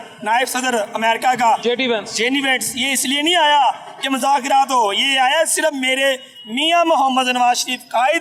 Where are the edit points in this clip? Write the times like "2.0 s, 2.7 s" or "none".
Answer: none